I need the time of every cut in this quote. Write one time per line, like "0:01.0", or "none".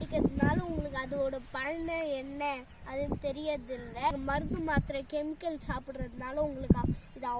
0:04.1